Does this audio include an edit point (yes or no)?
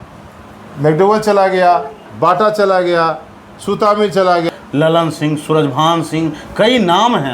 yes